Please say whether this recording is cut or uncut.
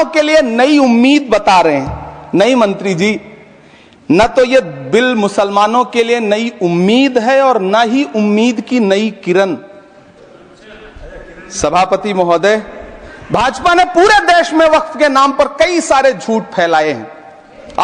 uncut